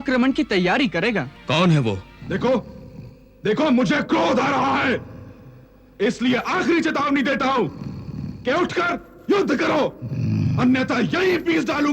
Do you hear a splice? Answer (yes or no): yes